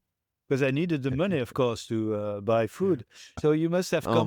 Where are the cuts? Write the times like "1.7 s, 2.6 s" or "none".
3.2 s